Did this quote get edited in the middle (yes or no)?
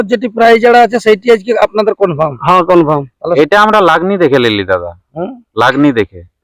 yes